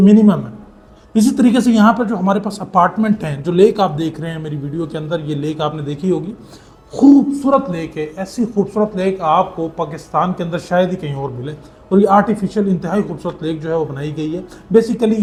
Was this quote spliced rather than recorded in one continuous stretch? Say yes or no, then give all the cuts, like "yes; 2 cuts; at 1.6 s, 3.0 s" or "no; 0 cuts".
no; 0 cuts